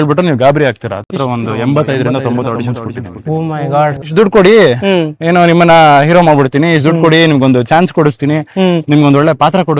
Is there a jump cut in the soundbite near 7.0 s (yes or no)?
no